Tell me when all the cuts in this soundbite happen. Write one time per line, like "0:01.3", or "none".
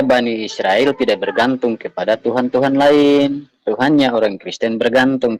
none